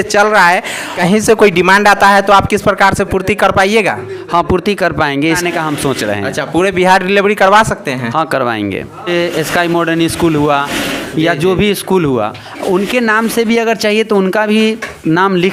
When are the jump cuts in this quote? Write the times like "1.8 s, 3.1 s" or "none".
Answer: 1.0 s, 5.4 s, 9.0 s